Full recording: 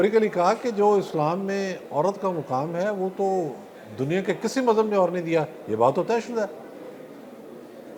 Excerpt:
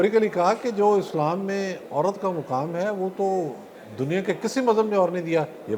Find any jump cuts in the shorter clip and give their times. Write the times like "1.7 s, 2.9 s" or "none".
none